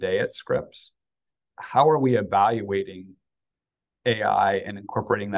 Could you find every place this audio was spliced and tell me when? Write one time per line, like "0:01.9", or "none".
0:01.5